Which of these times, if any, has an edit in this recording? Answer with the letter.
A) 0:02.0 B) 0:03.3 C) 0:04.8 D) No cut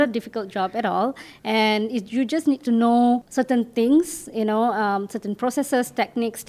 B